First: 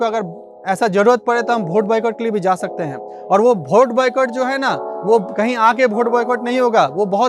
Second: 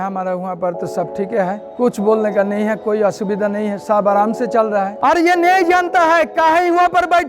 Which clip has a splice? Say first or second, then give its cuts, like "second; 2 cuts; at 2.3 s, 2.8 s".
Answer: second; 2 cuts; at 1.7 s, 4.9 s